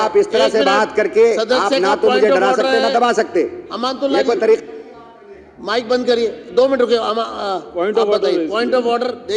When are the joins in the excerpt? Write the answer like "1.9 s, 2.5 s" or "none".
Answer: none